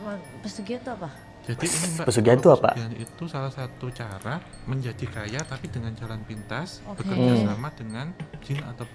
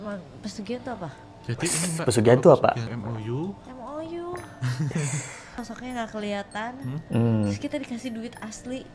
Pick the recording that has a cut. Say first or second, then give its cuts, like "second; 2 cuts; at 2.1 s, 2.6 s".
second; 2 cuts; at 2.9 s, 5.6 s